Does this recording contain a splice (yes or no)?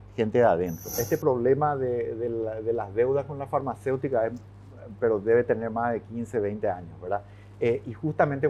yes